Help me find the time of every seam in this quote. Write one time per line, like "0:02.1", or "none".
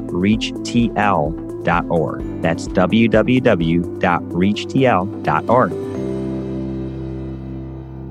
0:05.7

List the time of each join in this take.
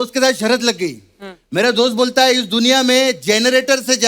none

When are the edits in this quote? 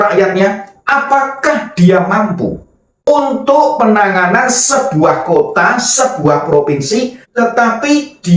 0:03.1

